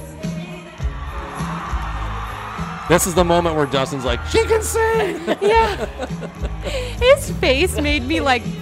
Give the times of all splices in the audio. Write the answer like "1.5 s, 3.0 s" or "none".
none